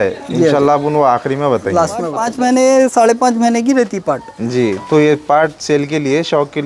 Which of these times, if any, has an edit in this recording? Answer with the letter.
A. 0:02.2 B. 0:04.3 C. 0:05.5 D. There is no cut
A